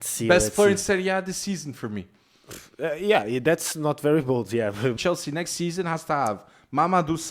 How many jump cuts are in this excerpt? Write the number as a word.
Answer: one